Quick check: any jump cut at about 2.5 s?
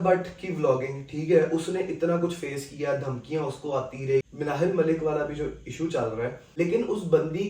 no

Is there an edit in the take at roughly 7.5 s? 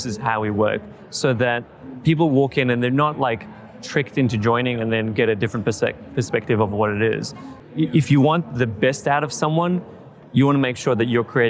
yes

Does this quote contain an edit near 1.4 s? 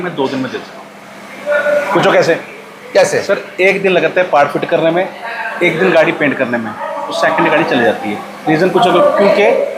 no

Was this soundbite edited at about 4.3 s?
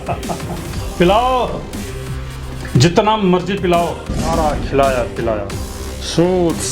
yes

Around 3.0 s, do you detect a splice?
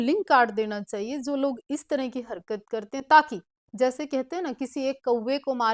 no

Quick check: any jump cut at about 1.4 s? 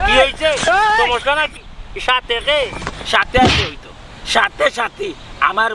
no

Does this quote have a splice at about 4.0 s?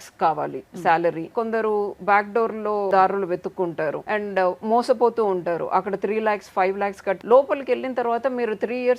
yes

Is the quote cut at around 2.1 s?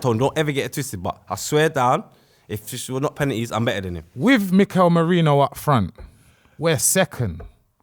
no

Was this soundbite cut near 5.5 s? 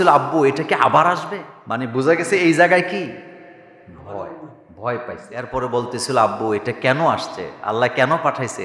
yes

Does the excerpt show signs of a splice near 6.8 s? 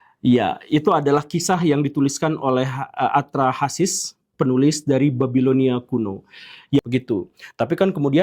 yes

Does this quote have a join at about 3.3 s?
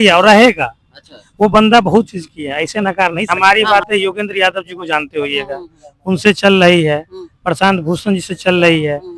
yes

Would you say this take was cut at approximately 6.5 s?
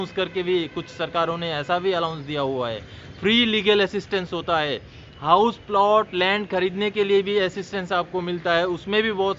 no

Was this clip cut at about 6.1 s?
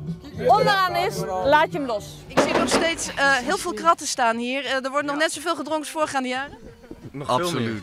no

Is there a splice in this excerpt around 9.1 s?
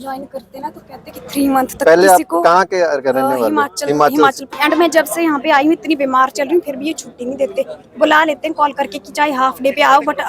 no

